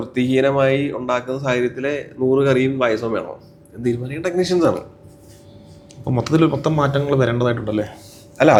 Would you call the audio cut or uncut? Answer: uncut